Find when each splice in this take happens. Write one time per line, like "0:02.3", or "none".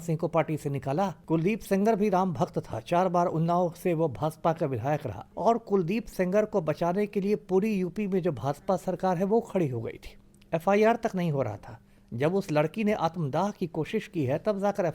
0:01.2
0:05.2